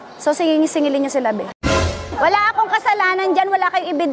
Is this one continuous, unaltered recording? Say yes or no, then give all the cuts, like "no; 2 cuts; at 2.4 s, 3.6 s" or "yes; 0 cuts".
no; 1 cut; at 1.9 s